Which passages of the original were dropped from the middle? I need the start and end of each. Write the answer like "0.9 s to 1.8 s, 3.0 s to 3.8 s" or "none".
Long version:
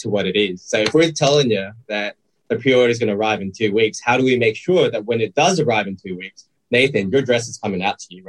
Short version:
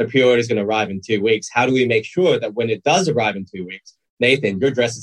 none